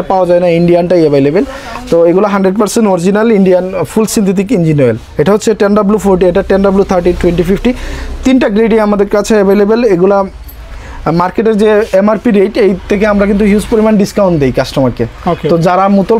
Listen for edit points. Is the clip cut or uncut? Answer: uncut